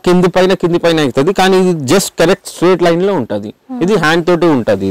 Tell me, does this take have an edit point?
no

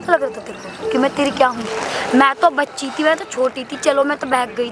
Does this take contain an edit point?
no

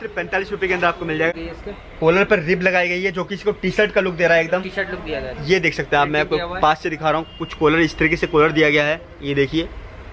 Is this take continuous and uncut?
no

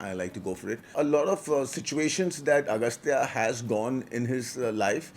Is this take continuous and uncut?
no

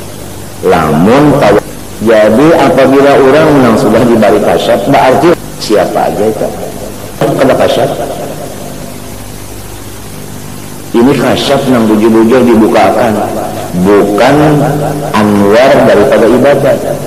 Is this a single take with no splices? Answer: no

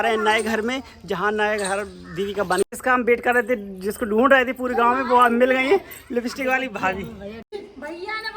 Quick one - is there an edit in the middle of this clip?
yes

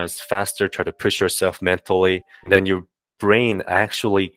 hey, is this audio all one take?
no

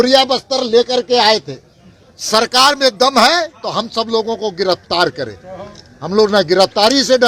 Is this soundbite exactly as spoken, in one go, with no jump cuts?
yes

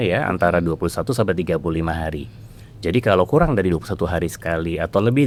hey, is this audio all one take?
yes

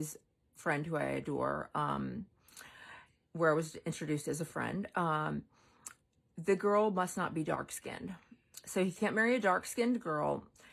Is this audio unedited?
yes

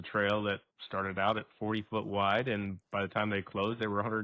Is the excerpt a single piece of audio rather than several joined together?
yes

